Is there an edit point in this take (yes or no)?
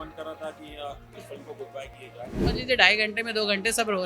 yes